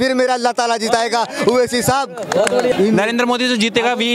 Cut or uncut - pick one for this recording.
cut